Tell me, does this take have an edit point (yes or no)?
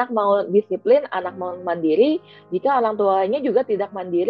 no